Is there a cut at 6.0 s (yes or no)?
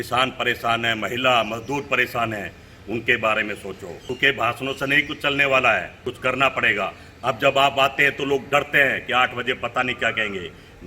yes